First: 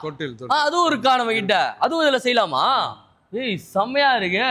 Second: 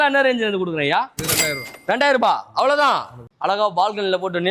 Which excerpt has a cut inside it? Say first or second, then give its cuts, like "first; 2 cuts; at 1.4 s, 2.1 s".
second; 1 cut; at 3.2 s